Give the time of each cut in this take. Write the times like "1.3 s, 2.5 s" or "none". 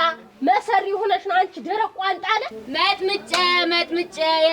2.5 s